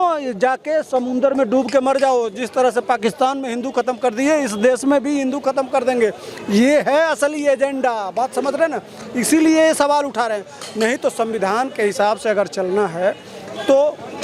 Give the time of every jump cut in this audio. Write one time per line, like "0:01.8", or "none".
none